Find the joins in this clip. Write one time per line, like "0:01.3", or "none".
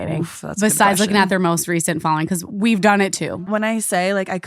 0:03.4